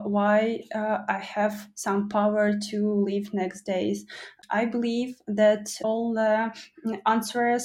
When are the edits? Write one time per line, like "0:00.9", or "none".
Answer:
0:04.4
0:05.7